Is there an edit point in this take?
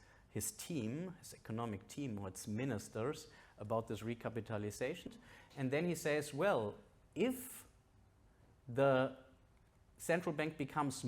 yes; 1 cut; at 5.1 s

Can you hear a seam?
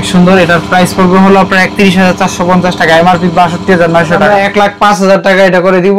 yes; 1 cut; at 4.3 s

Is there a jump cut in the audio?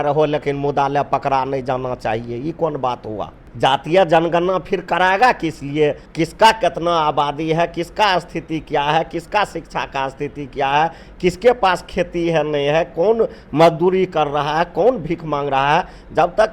yes; 2 cuts; at 3.4 s, 6.0 s

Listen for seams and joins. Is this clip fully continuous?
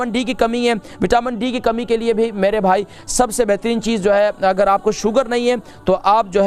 yes; 0 cuts

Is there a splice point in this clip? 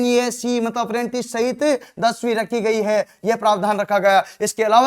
no; 0 cuts

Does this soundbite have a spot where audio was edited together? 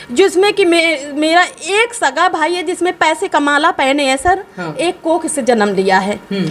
no; 0 cuts

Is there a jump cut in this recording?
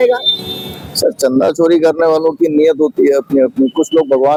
no; 0 cuts

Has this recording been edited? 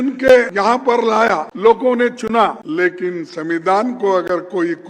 yes; 2 cuts; at 1.1 s, 2.6 s

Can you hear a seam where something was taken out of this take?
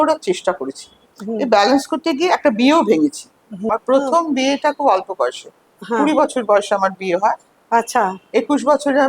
yes; 1 cut; at 3.7 s

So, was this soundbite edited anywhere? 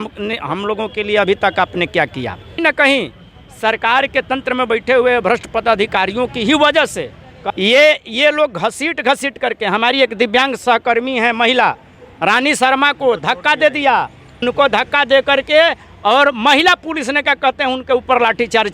yes; 3 cuts; at 2.6 s, 7.3 s, 14.4 s

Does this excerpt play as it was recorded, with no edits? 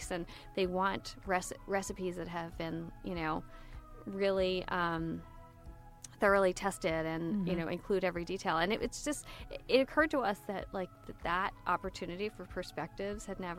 yes; 0 cuts

